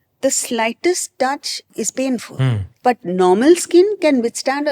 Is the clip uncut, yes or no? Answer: no